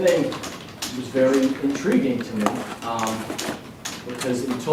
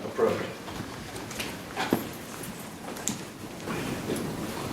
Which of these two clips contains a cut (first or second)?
second